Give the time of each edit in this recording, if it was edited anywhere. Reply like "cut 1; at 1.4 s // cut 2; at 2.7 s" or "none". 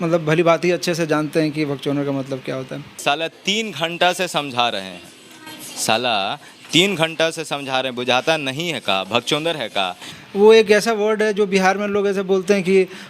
cut 1; at 2.9 s // cut 2; at 10.1 s